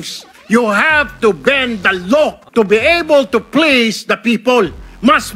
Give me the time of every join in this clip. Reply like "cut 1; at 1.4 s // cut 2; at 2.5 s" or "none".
cut 1; at 2.4 s